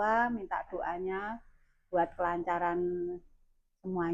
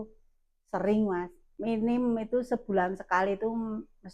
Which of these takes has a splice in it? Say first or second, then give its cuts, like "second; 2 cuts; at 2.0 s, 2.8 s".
second; 1 cut; at 1.4 s